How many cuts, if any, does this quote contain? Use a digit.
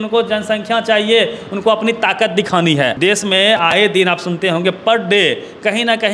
1